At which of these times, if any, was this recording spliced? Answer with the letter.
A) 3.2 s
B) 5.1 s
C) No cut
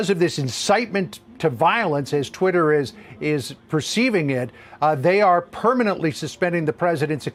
C